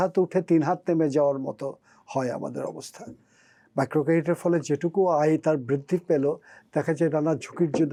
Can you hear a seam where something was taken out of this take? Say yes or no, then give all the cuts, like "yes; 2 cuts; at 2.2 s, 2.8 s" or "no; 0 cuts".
no; 0 cuts